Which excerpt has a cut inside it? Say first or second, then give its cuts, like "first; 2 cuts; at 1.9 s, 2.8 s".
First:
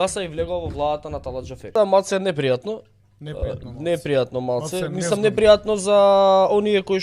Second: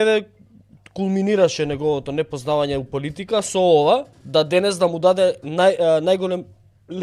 first; 1 cut; at 1.7 s